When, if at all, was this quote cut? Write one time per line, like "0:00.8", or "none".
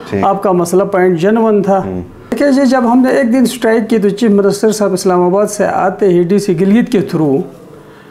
0:02.4

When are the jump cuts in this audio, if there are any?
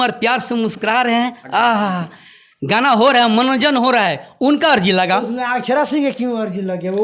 none

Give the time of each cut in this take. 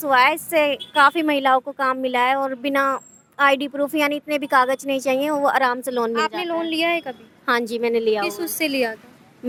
none

